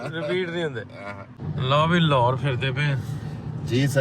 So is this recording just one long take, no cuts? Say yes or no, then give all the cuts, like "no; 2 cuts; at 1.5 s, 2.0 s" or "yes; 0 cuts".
no; 1 cut; at 1.4 s